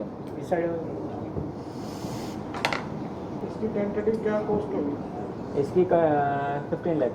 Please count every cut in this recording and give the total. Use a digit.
1